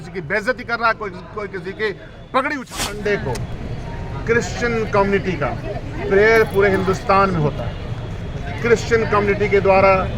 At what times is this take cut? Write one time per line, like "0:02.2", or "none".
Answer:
0:02.7

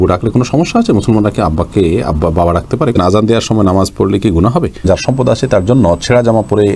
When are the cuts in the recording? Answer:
0:02.9
0:04.8

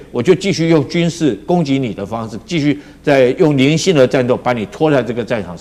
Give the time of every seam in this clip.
none

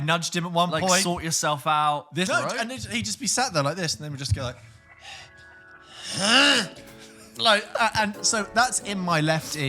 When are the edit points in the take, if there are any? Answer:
0:02.3

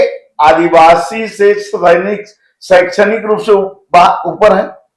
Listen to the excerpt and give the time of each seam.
none

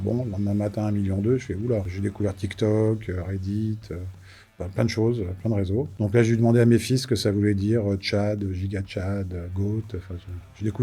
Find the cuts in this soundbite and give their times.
none

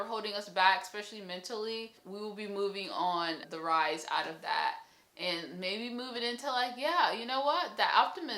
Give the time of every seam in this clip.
0:02.0
0:03.5

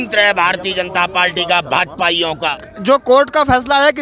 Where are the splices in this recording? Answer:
0:02.6

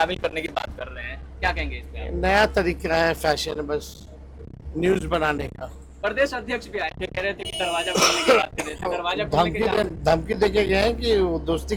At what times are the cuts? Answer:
none

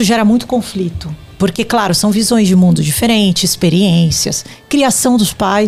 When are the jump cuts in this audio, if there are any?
none

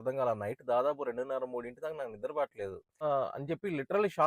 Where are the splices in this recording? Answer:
0:03.0

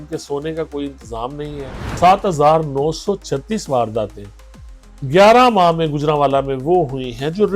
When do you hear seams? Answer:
0:01.9

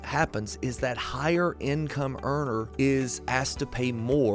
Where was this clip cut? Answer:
none

